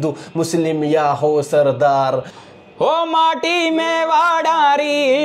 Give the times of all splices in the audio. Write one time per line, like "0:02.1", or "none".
0:02.4